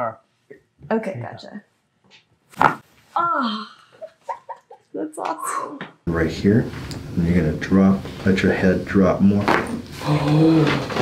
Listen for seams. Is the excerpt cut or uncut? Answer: cut